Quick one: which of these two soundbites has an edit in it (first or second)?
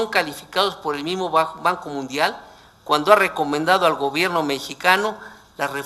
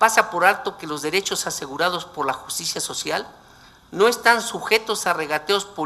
first